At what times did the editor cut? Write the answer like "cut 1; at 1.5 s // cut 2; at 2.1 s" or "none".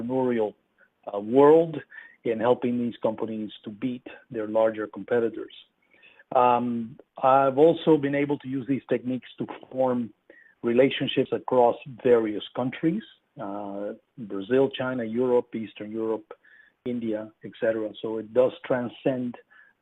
cut 1; at 8.8 s